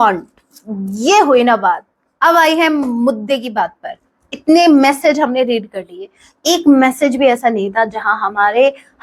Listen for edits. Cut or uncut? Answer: uncut